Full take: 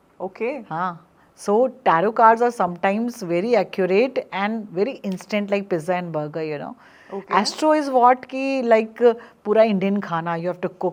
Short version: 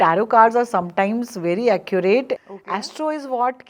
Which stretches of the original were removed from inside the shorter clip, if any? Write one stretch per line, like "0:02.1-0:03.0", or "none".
0:04.3-0:07.1